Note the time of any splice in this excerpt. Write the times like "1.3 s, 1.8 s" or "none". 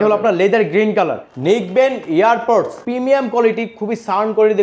1.2 s, 2.8 s

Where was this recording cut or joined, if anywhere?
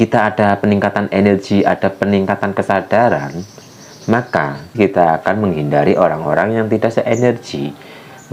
4.7 s

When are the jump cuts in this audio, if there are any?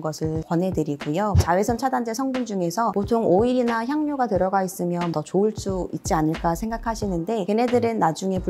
1.4 s, 2.9 s, 5.1 s

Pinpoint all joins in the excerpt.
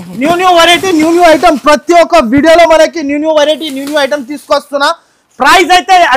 none

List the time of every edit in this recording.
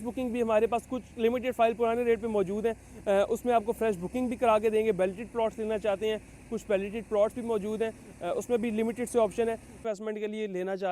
9.8 s

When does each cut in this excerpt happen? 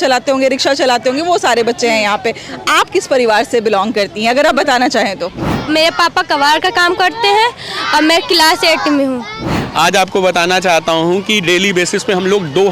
5.6 s, 9.6 s

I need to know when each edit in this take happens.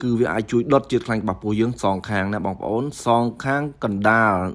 none

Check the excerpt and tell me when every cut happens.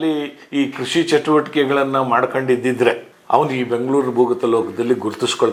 none

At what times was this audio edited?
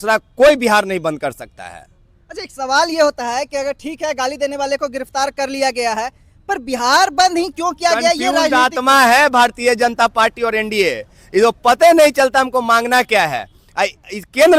none

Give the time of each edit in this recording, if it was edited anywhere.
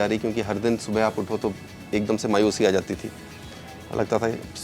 none

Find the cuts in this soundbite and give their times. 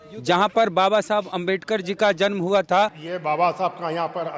3.0 s

